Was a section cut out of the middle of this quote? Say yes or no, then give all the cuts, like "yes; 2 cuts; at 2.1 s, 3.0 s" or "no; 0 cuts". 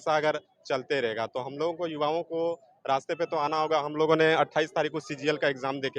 no; 0 cuts